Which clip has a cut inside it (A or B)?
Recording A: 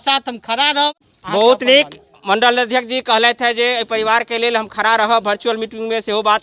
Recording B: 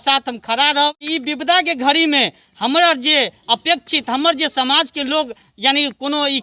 B